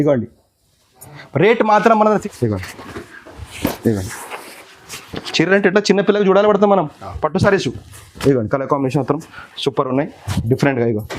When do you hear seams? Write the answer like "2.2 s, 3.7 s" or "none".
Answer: 2.2 s